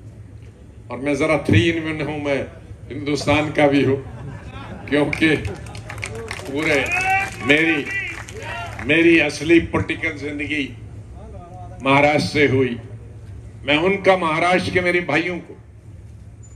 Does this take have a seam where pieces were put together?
no; 0 cuts

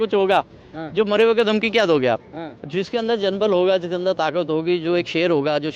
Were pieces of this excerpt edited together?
no; 0 cuts

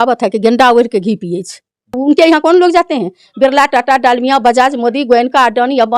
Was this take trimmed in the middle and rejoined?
yes; 1 cut; at 2.0 s

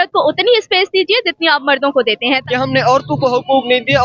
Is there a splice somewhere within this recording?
yes; 1 cut; at 2.4 s

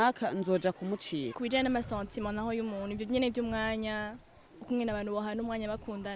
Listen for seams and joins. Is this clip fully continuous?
no; 1 cut; at 1.4 s

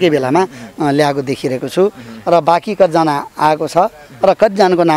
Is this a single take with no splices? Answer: yes; 0 cuts

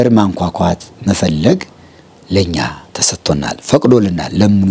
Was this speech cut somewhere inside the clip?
no; 0 cuts

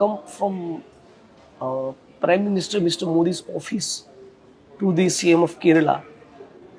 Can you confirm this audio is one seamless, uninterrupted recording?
yes; 0 cuts

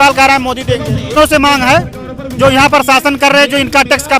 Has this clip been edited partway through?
yes; 1 cut; at 1.1 s

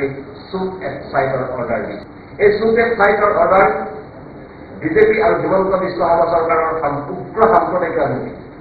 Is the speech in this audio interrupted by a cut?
no; 0 cuts

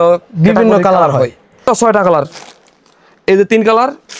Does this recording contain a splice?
yes; 1 cut; at 1.6 s

